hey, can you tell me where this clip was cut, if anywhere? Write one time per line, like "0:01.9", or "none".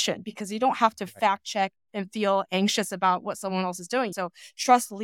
0:04.1